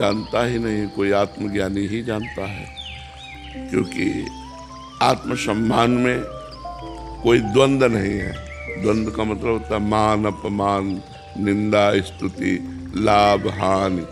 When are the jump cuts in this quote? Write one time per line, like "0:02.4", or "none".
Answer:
none